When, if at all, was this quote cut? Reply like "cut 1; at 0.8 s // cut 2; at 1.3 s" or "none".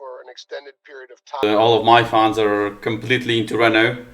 cut 1; at 1.4 s